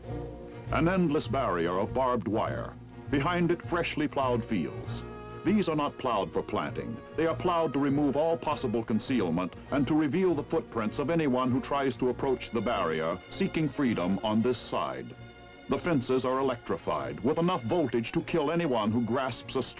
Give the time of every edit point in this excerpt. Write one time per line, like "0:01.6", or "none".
none